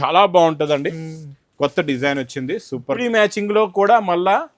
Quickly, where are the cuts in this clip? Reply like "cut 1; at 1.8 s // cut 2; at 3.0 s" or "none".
cut 1; at 3.0 s